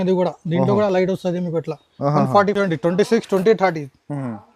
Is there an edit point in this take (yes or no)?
yes